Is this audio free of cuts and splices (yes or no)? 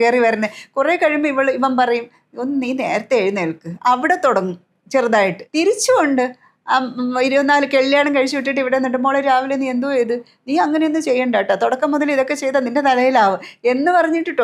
no